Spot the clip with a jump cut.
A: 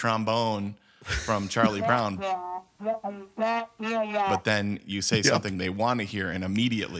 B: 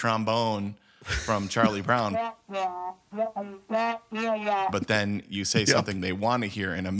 A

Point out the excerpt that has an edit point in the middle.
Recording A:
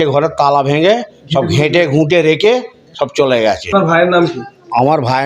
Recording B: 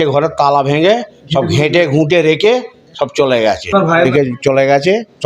B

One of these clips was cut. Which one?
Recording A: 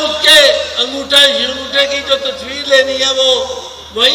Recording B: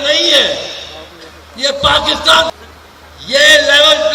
B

